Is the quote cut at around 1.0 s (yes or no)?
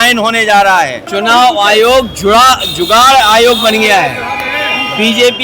yes